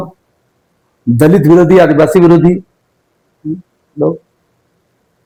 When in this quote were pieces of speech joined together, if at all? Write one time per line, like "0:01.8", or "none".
none

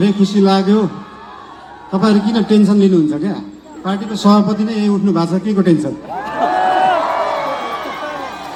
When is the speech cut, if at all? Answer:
none

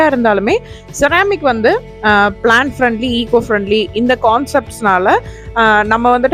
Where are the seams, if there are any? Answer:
none

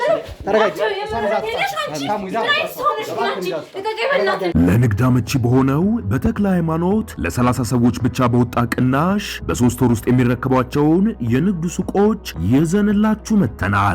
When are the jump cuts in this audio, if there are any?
0:04.5

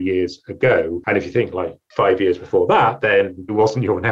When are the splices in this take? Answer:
0:01.4

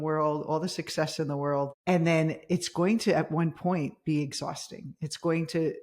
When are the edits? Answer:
0:01.8

